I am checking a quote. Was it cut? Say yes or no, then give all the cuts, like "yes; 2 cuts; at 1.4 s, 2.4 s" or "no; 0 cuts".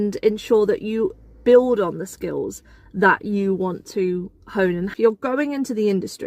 yes; 1 cut; at 4.9 s